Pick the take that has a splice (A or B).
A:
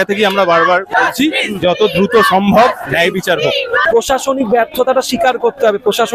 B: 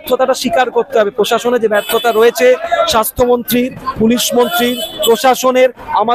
A